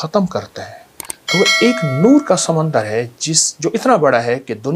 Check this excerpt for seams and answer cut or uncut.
uncut